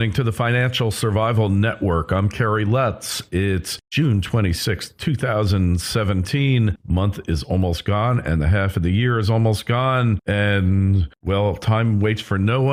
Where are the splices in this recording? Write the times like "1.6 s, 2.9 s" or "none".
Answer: none